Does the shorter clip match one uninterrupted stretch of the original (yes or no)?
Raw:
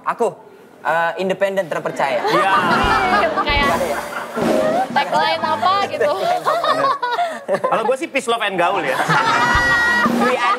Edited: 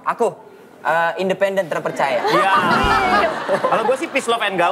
no